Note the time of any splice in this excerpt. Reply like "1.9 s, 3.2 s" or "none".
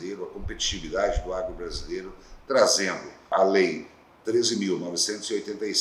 3.3 s